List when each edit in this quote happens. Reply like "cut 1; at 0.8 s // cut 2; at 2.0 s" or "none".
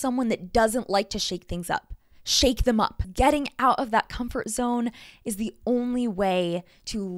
cut 1; at 3.1 s